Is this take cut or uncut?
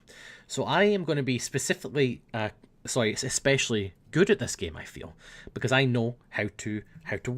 cut